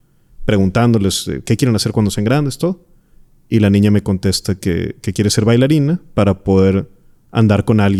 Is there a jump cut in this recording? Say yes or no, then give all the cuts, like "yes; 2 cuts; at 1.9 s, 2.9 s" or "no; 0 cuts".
no; 0 cuts